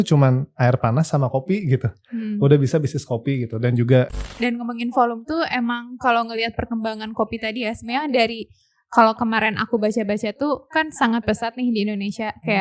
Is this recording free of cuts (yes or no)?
no